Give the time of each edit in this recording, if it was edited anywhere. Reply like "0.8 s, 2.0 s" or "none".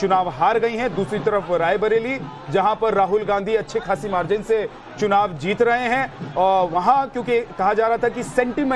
2.9 s